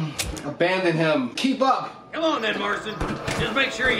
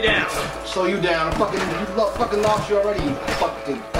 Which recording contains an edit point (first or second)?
first